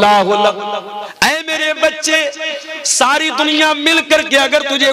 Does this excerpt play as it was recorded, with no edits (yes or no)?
no